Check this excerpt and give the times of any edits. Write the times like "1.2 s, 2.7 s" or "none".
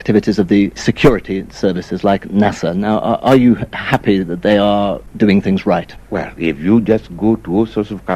5.1 s, 6.0 s